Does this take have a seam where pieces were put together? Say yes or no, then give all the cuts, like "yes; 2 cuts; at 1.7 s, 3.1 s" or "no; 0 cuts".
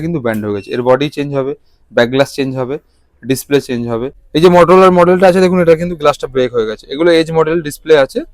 yes; 1 cut; at 4.2 s